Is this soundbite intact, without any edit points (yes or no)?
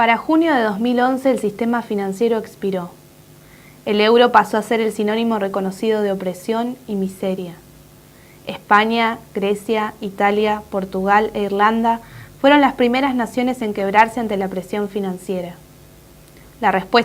yes